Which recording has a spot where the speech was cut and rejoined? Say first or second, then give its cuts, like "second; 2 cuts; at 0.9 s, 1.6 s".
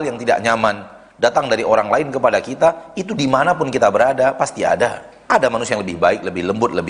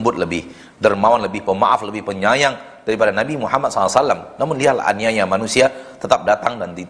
first; 1 cut; at 5.3 s